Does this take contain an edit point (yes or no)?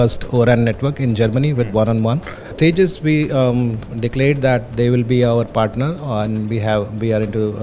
yes